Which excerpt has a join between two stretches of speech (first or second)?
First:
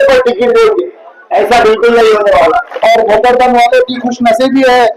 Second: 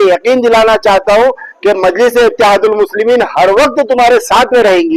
first